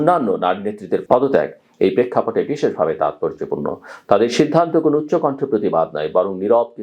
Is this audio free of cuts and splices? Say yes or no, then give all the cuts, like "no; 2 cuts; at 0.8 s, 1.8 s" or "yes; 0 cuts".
no; 1 cut; at 1.0 s